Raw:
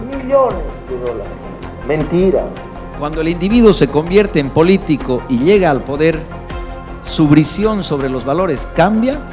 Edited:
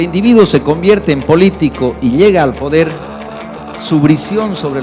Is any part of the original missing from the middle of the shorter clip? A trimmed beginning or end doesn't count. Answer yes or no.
no